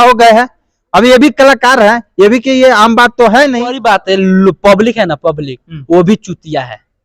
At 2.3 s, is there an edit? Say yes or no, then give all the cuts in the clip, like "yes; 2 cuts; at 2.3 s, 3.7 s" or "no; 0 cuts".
no; 1 cut; at 3.8 s